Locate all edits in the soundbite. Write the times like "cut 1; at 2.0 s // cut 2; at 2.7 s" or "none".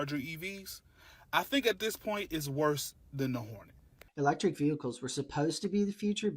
cut 1; at 4.1 s